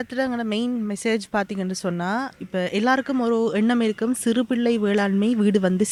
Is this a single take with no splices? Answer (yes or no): yes